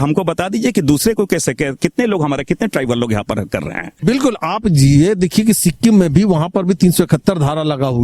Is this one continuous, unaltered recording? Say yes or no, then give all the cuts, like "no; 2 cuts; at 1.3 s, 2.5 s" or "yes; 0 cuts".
no; 1 cut; at 3.9 s